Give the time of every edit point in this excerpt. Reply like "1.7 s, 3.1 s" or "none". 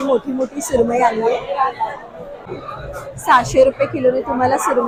none